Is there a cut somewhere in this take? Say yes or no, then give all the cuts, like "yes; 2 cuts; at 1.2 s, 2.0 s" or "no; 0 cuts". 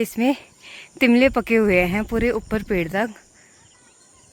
no; 0 cuts